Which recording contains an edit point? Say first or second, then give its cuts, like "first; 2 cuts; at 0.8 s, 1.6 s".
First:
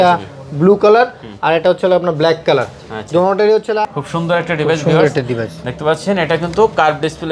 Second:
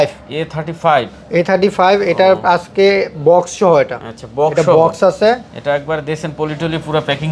first; 1 cut; at 3.8 s